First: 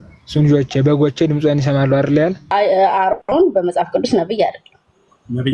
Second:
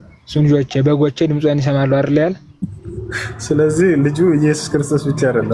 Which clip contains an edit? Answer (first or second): first